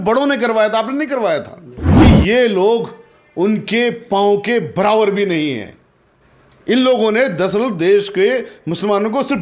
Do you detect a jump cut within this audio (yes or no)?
yes